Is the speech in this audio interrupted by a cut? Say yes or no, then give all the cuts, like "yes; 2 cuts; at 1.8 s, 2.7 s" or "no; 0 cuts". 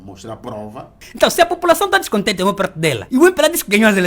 yes; 2 cuts; at 1.0 s, 3.0 s